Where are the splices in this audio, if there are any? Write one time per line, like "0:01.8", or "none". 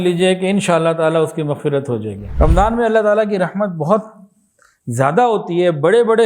0:02.2

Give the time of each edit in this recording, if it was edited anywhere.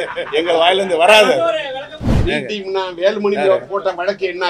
0:02.2

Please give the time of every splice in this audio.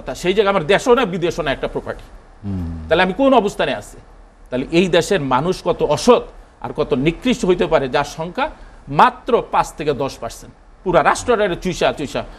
none

